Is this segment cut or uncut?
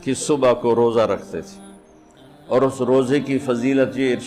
uncut